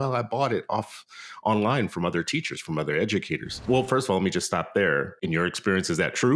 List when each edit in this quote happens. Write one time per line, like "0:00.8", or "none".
0:03.6
0:05.2